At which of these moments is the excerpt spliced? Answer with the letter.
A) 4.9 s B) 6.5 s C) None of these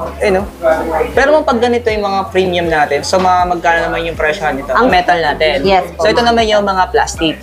A